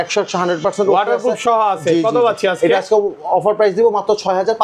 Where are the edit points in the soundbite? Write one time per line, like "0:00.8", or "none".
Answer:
none